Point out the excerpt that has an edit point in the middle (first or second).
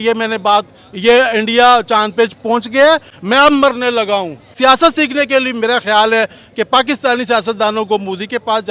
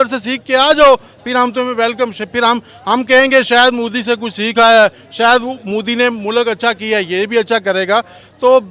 first